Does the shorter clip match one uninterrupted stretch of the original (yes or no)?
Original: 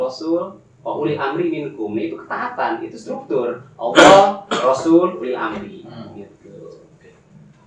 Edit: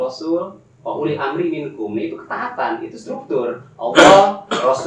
yes